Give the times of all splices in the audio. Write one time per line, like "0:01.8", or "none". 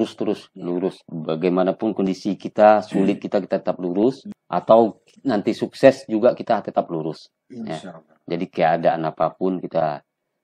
0:01.1
0:04.3